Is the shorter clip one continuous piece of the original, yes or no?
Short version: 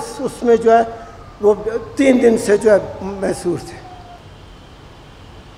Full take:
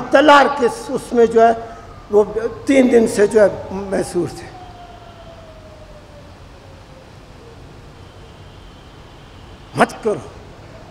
no